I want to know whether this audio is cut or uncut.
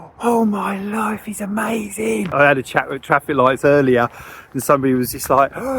cut